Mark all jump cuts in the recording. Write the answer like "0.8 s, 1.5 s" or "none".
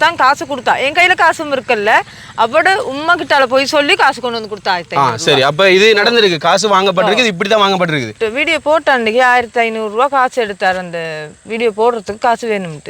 8.1 s